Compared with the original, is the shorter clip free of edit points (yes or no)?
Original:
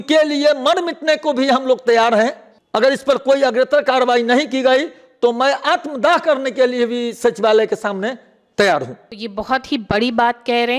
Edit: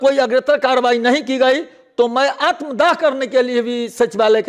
yes